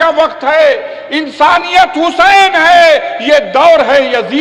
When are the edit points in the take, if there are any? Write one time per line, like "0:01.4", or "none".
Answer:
none